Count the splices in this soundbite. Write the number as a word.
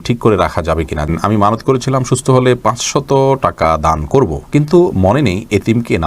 one